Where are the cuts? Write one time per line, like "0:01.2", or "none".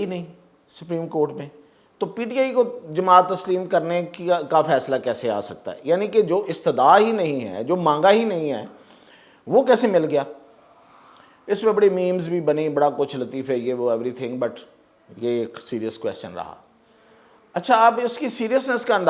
none